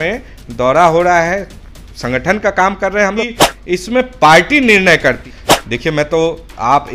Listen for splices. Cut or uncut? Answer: cut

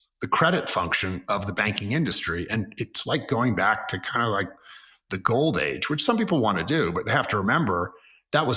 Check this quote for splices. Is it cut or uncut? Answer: uncut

